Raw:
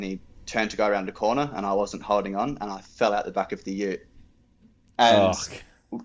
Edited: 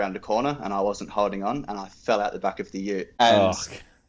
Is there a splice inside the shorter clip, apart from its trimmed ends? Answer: yes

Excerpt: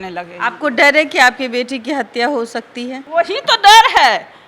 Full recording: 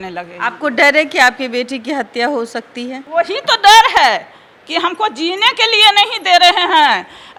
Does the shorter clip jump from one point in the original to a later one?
no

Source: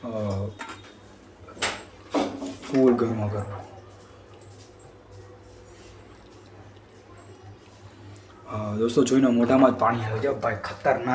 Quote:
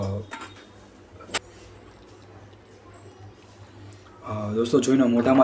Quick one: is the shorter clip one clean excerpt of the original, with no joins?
no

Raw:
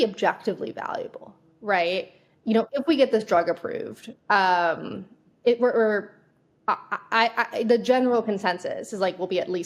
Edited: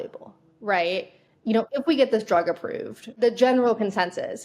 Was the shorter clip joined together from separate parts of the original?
yes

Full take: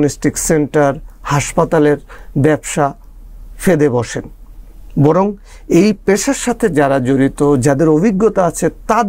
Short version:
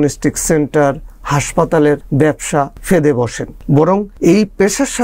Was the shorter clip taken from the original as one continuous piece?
no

